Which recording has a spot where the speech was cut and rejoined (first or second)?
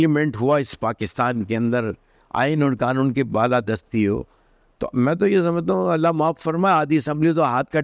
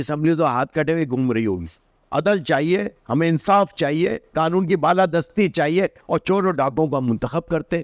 second